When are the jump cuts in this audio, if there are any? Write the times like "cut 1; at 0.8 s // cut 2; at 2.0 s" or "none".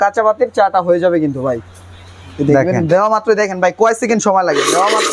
none